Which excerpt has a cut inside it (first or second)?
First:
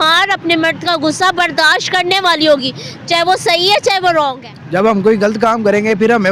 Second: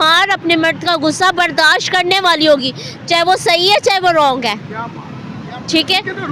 first